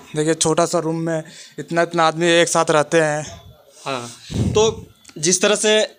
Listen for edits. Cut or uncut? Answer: uncut